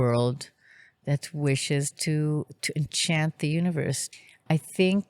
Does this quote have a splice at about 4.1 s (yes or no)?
yes